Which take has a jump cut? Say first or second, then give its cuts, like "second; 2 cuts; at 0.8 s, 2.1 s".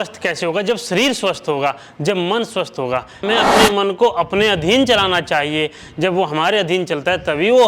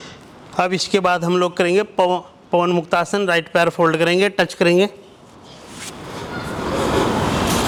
first; 1 cut; at 3.2 s